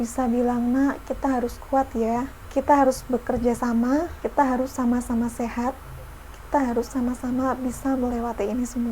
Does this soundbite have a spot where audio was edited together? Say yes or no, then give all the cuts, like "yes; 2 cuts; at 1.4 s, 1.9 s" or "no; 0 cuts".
yes; 2 cuts; at 2.4 s, 4.2 s